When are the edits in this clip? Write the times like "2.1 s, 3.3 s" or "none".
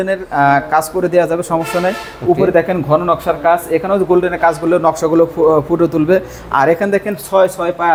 none